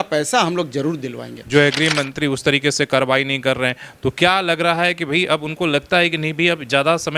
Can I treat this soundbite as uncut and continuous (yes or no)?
no